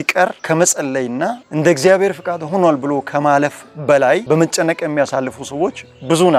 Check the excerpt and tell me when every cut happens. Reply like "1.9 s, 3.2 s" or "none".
none